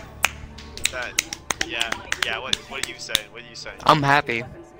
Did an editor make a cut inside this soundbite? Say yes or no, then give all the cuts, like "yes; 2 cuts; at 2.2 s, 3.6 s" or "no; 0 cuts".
no; 0 cuts